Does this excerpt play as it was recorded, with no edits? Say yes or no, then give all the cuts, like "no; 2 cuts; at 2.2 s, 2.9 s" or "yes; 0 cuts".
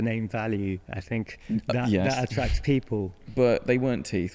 no; 1 cut; at 3.2 s